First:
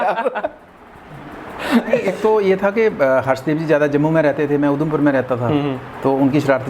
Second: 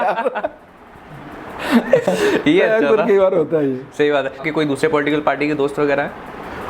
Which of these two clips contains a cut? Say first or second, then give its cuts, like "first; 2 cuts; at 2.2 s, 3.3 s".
first; 1 cut; at 2.1 s